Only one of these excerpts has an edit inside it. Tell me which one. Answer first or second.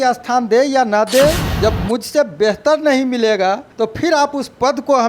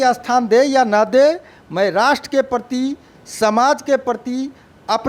first